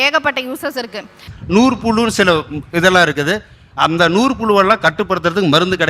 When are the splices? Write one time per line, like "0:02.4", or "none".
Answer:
0:01.3